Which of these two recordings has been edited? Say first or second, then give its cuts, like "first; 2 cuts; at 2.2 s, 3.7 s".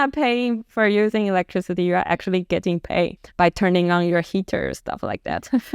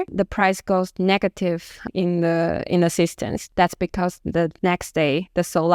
first; 1 cut; at 3.2 s